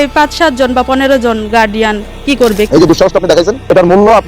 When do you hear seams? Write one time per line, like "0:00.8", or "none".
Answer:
0:02.7